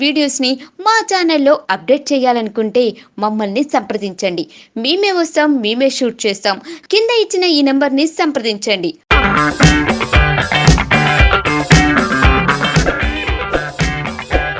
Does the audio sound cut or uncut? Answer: uncut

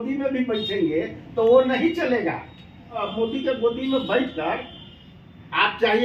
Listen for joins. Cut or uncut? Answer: cut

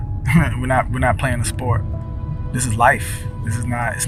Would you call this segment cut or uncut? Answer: uncut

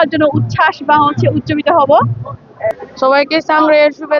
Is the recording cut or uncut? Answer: cut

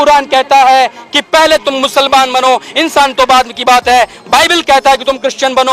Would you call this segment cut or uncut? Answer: uncut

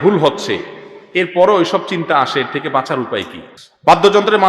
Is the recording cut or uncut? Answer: cut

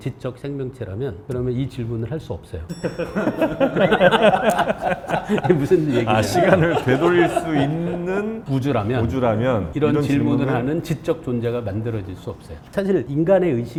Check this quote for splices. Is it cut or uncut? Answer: uncut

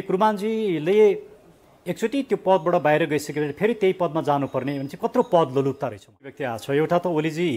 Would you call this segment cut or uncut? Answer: cut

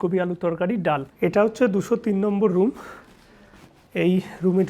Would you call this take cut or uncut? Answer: cut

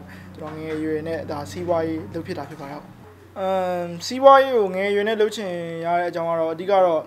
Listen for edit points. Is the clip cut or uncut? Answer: uncut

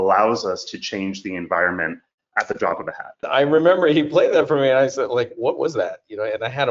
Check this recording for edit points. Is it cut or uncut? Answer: cut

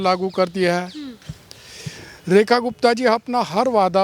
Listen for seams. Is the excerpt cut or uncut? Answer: uncut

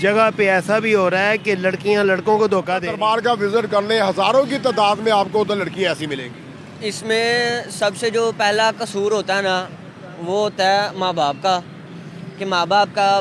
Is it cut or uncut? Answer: cut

